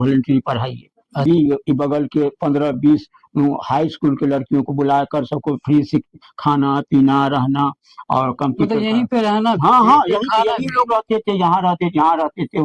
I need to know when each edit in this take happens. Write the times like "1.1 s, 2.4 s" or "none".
1.2 s